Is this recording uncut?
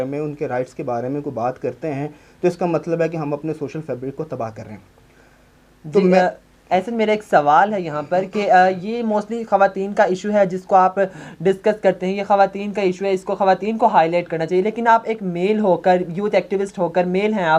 yes; 0 cuts

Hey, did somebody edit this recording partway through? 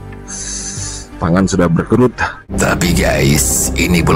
yes; 1 cut; at 2.4 s

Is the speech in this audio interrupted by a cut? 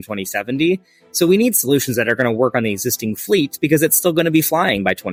no; 0 cuts

